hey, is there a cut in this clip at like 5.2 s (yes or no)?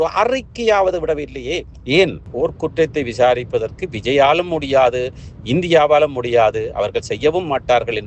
no